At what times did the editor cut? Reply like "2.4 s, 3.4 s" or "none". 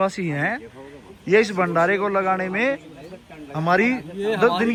none

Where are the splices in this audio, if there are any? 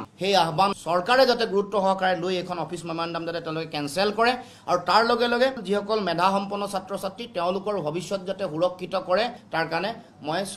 9.4 s

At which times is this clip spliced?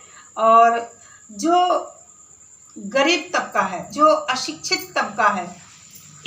3.9 s

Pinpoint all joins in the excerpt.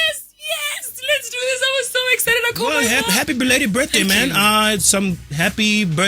2.8 s

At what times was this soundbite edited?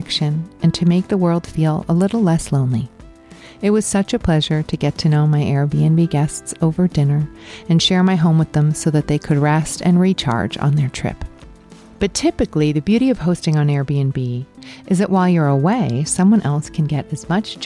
none

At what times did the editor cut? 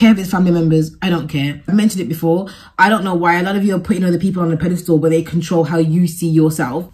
1.6 s

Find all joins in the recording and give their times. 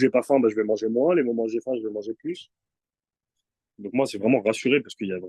3.3 s

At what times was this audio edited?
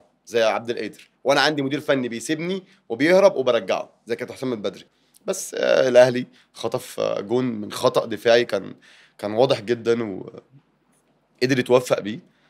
4.8 s

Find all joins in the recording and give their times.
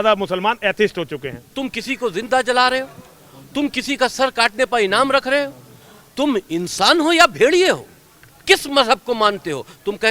1.6 s

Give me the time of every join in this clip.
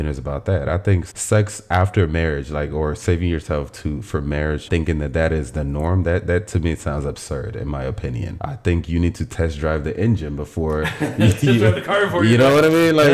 1.1 s, 4.7 s, 8.3 s

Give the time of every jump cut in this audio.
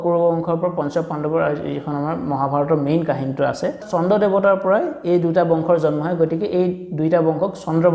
3.8 s

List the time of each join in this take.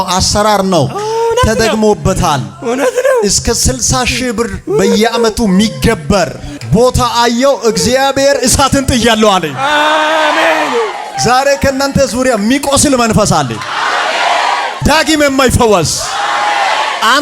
6.5 s, 11.1 s, 14.7 s

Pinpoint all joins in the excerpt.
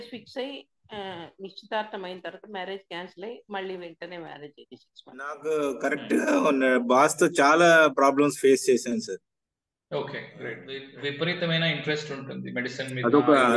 5.4 s, 10.8 s

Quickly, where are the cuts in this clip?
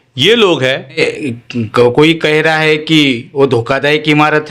1.0 s

